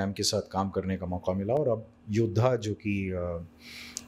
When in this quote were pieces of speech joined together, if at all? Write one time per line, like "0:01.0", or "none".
none